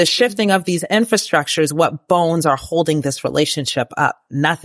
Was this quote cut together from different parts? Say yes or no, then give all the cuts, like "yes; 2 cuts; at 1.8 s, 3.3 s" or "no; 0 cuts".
no; 0 cuts